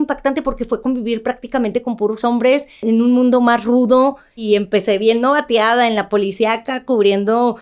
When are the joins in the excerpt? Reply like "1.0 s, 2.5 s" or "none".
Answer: 2.8 s, 4.4 s

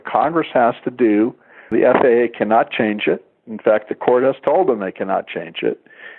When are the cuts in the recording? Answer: 1.7 s

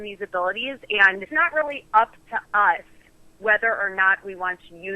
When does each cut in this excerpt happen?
1.2 s

